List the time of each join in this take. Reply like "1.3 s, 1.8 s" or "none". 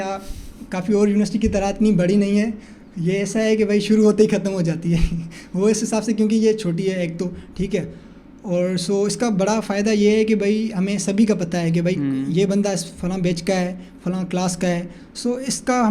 none